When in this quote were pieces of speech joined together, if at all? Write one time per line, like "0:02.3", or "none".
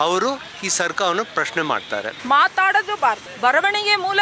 0:02.1
0:03.3